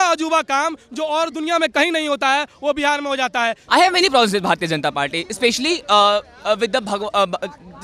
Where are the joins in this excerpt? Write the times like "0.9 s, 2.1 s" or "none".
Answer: 3.6 s